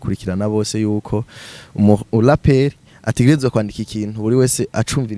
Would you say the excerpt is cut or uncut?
uncut